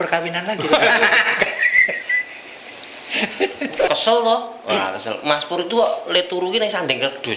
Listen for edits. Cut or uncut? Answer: cut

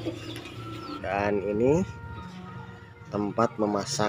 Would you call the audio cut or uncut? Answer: cut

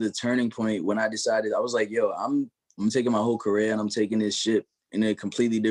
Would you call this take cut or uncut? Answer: cut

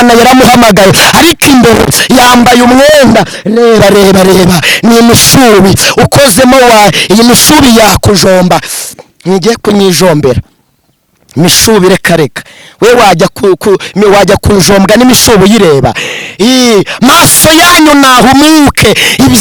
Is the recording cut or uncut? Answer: uncut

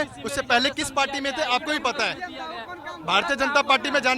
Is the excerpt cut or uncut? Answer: uncut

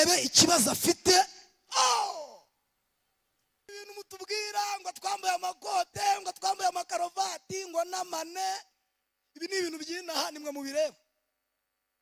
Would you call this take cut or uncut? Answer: cut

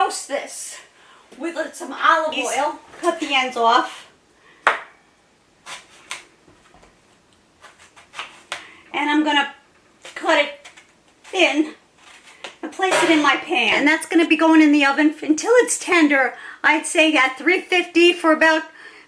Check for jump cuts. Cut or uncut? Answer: cut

